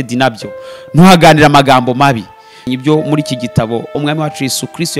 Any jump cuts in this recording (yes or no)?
yes